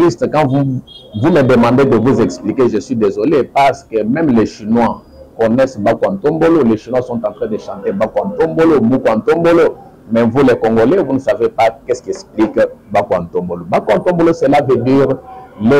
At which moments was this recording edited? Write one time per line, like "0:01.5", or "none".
none